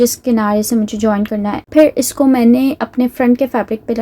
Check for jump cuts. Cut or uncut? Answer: cut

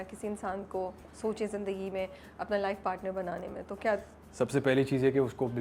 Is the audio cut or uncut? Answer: uncut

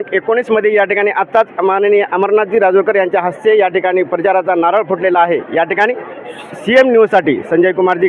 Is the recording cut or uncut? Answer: uncut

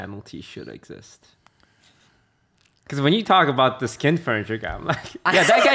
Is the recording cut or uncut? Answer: uncut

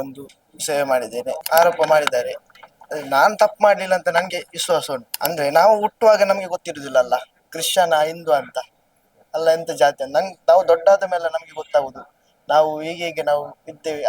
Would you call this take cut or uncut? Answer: cut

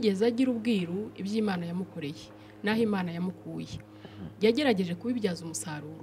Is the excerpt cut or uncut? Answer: uncut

